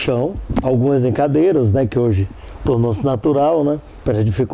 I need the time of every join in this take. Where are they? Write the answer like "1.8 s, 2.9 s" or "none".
3.2 s

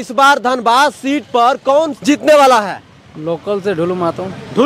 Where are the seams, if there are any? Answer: 1.9 s

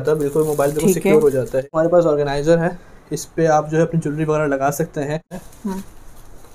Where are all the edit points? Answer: 1.7 s, 5.3 s

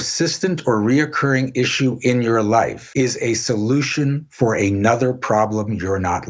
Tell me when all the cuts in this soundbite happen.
2.8 s

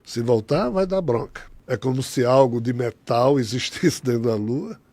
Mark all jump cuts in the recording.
0.9 s

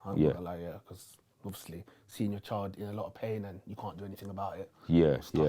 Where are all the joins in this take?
none

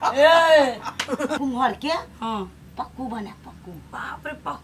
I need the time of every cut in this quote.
1.4 s

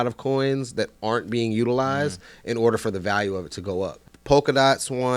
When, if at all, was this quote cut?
4.0 s

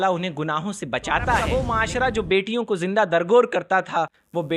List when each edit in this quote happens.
1.7 s

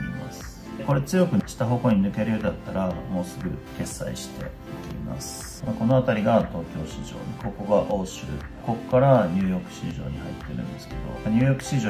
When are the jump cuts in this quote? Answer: 5.6 s

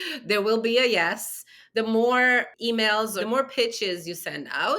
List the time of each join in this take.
2.9 s

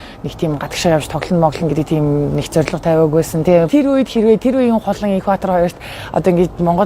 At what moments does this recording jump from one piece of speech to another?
3.7 s

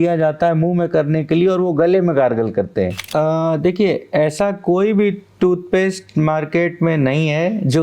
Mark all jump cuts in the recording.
3.0 s

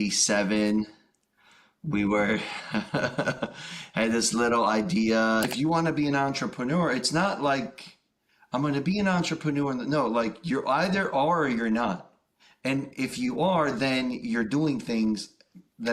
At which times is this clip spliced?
5.5 s

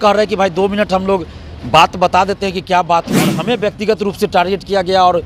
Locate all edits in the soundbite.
3.4 s

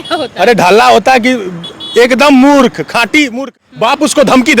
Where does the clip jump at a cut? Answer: 3.6 s

